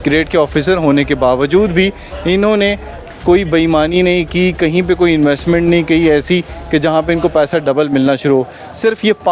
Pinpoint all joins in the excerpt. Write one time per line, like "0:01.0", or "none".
none